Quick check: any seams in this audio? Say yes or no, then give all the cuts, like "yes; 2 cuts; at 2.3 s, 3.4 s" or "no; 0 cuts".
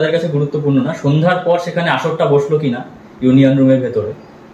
no; 0 cuts